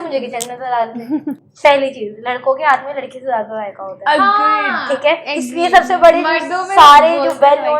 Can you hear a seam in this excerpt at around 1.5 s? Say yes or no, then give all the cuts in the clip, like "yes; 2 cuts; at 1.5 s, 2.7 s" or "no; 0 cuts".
yes; 1 cut; at 1.5 s